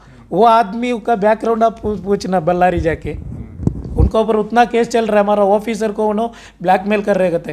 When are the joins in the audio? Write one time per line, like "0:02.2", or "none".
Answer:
none